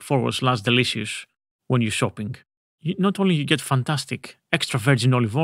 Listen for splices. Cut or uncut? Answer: uncut